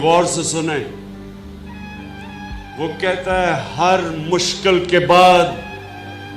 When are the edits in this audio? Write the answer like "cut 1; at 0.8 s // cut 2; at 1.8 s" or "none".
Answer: cut 1; at 1.1 s // cut 2; at 2.7 s